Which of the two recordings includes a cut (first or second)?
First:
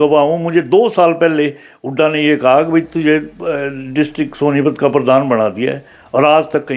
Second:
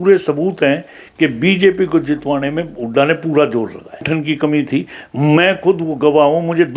second